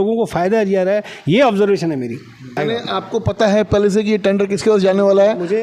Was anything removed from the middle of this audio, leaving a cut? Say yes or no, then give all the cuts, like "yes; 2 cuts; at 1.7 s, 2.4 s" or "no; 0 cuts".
yes; 1 cut; at 2.6 s